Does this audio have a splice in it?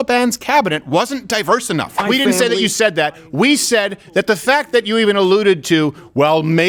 yes; 1 cut; at 2.0 s

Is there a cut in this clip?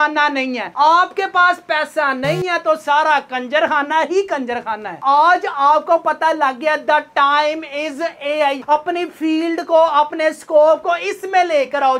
yes; 1 cut; at 5.0 s

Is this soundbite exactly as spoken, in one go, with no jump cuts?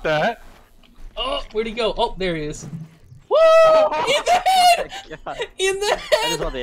no; 1 cut; at 1.5 s

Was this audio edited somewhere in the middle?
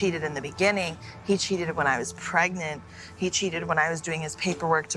no; 0 cuts

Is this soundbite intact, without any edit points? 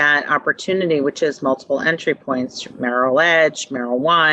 yes; 0 cuts

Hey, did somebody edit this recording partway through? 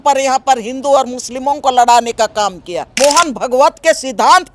yes; 1 cut; at 2.9 s

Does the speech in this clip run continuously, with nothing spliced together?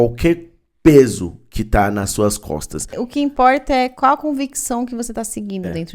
no; 1 cut; at 3.0 s

